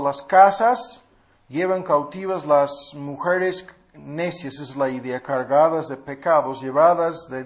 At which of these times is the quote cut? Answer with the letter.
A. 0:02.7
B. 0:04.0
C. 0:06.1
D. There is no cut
D